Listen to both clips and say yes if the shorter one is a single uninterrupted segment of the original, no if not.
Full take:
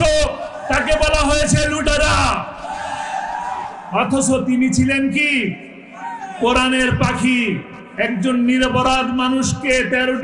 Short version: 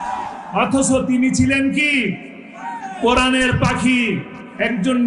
yes